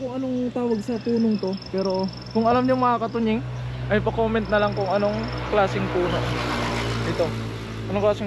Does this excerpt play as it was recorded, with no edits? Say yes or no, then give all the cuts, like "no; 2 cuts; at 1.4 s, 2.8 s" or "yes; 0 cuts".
yes; 0 cuts